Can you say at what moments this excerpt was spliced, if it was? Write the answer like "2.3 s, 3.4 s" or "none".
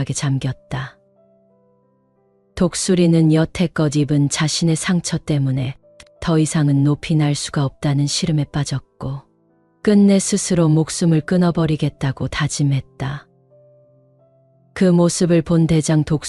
0.9 s, 2.5 s